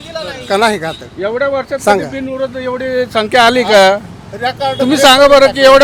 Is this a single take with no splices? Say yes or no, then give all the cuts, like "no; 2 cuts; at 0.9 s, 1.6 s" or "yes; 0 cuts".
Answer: yes; 0 cuts